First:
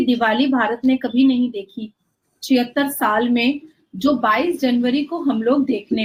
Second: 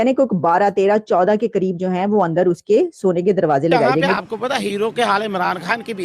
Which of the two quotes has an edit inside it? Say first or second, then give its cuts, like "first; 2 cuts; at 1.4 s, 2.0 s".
second; 1 cut; at 4.1 s